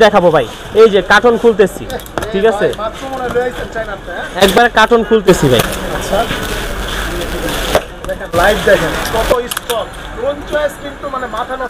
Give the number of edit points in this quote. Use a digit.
0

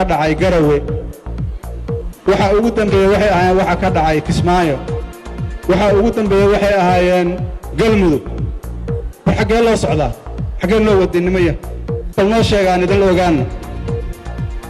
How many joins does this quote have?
1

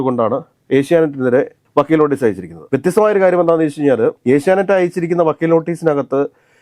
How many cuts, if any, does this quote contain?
0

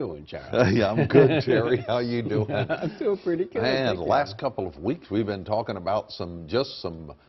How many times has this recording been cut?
0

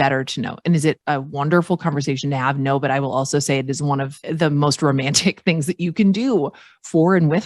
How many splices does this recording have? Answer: 2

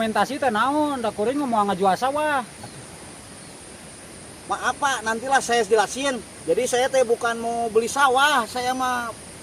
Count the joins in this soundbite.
2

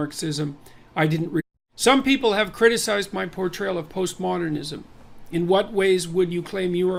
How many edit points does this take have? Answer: 0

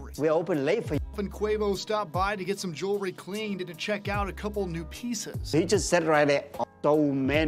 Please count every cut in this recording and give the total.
2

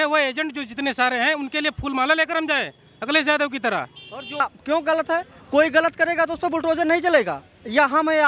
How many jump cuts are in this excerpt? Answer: 1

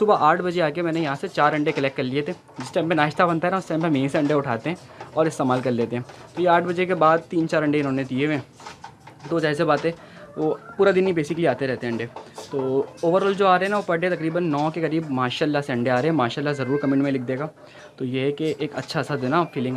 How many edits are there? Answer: 0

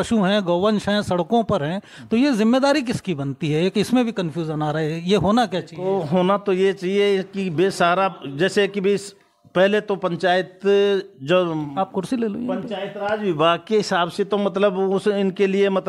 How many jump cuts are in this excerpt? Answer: 0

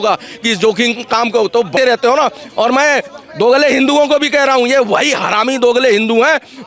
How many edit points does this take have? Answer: 1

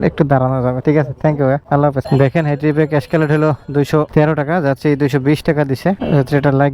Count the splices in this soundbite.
0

